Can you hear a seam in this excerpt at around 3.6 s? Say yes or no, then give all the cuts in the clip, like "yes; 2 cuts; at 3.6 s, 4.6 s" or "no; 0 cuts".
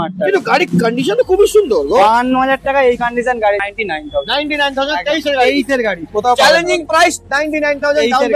yes; 1 cut; at 3.6 s